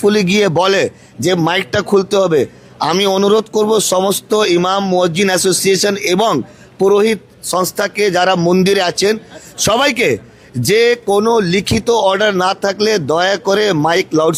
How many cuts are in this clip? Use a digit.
0